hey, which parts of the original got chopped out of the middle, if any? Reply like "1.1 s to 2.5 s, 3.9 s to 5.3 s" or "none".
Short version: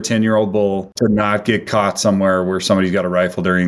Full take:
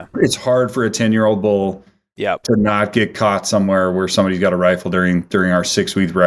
1.8 s to 2.4 s